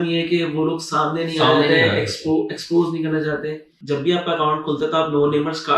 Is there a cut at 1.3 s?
no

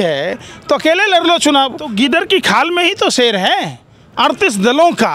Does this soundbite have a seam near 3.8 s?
no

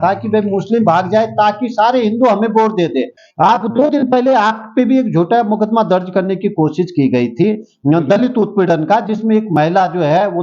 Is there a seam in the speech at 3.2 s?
yes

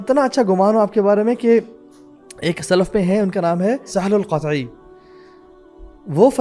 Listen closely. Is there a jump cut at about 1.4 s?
no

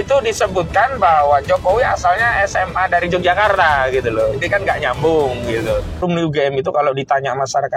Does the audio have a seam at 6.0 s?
yes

